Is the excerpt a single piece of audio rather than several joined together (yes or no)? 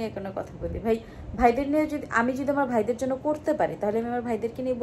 yes